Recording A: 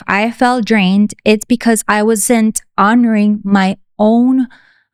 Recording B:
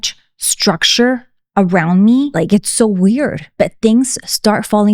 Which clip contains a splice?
B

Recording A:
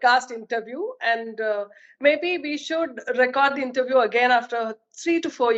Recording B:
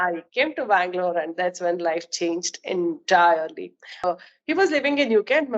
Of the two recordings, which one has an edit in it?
B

